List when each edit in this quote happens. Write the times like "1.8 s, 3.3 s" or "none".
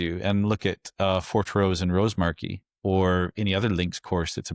none